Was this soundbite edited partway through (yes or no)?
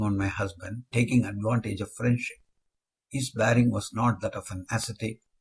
no